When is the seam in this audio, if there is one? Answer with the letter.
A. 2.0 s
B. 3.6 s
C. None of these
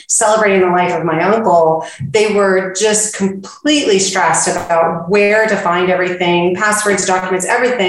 C